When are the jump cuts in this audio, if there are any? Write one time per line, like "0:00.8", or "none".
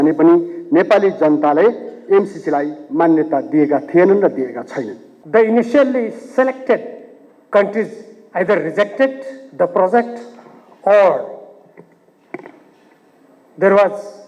0:05.1